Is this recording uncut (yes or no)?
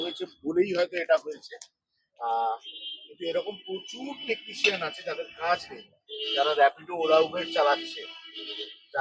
yes